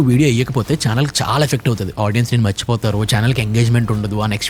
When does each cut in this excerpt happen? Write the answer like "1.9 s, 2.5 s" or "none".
none